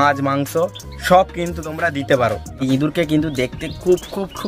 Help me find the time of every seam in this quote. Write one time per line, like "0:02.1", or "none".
0:02.5